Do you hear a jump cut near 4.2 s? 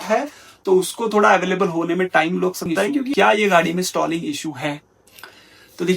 no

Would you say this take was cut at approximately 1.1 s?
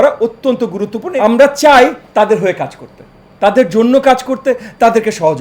yes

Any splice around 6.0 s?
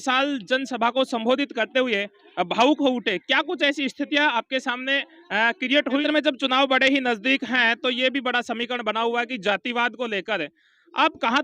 yes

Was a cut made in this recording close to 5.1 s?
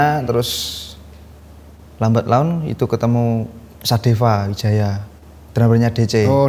yes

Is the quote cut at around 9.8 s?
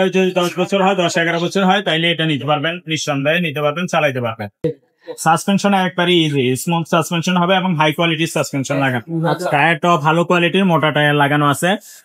no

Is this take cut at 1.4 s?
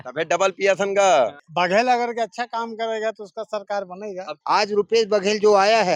yes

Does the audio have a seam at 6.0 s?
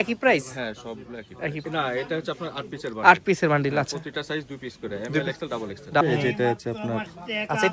yes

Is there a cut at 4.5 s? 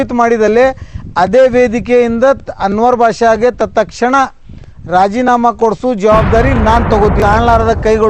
no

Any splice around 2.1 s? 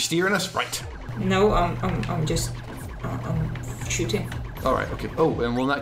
yes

